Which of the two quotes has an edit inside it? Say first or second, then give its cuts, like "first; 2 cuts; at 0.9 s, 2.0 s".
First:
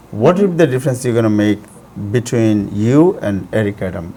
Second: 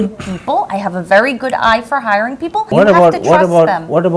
second; 1 cut; at 2.7 s